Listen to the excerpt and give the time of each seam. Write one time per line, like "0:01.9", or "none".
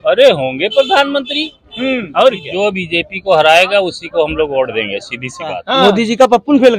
0:02.4
0:05.6